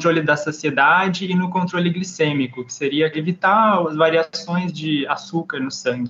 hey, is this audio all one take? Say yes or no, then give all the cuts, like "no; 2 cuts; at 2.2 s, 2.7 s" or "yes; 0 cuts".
no; 1 cut; at 3.1 s